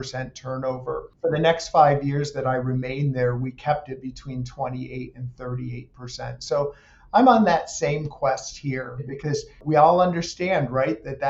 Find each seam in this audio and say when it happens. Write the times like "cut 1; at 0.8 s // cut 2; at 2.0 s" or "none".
cut 1; at 1.1 s // cut 2; at 9.0 s

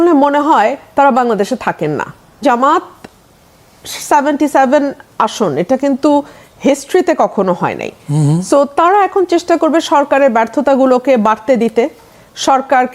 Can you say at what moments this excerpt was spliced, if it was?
cut 1; at 2.4 s

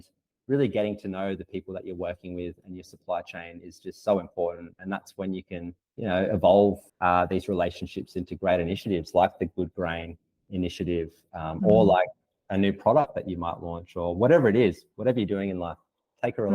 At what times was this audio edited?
cut 1; at 5.8 s // cut 2; at 6.9 s

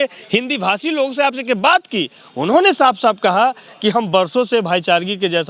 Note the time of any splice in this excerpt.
none

